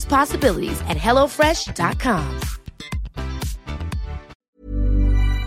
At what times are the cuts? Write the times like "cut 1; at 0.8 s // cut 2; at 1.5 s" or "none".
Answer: cut 1; at 4.4 s